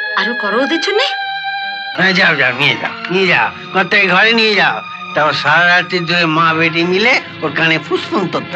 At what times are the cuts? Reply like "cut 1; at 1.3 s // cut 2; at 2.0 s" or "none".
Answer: cut 1; at 1.9 s